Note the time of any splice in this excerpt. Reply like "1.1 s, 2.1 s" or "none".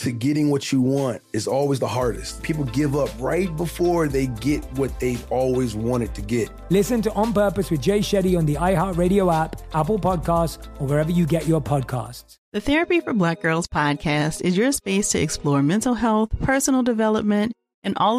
12.4 s